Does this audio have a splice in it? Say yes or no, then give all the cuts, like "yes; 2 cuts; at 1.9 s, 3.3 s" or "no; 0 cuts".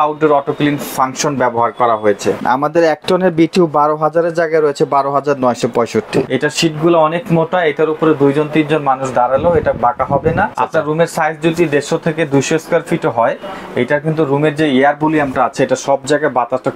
yes; 3 cuts; at 2.4 s, 6.3 s, 10.5 s